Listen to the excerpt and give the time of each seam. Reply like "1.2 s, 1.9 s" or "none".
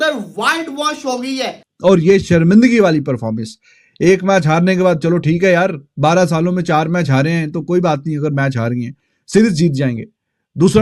1.6 s